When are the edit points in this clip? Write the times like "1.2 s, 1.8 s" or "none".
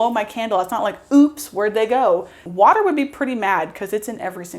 2.4 s